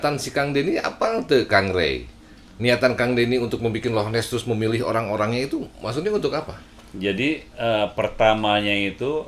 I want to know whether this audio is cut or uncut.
uncut